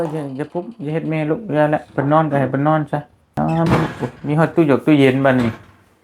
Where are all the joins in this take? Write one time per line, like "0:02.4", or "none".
0:03.3